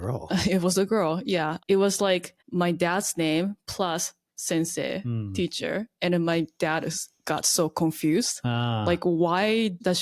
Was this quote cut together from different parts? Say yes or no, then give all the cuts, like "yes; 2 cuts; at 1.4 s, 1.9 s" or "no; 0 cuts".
yes; 1 cut; at 1.6 s